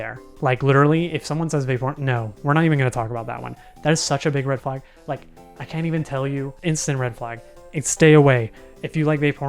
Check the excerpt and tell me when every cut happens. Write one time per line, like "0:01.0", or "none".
0:06.5